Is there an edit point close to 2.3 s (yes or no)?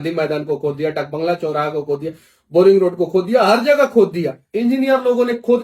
no